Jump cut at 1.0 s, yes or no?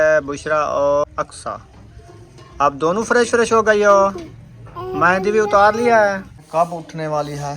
yes